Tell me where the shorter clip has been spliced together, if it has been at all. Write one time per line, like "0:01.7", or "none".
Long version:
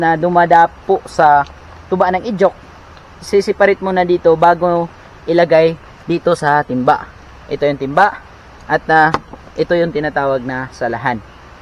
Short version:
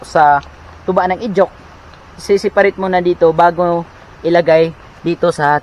none